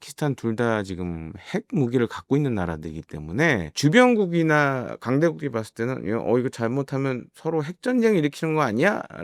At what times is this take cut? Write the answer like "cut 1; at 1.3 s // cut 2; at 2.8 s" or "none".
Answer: none